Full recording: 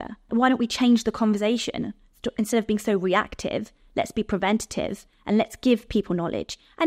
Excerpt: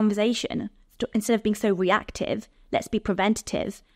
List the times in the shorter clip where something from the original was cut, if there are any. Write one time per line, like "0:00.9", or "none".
none